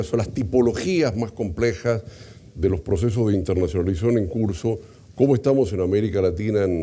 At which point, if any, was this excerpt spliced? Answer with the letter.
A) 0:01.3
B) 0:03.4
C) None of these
B